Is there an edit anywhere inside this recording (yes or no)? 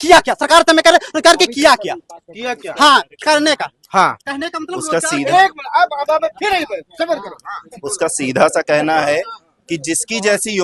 no